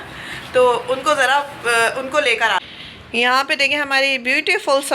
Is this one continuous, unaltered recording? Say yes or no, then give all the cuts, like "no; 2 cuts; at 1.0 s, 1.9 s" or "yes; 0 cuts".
no; 1 cut; at 2.6 s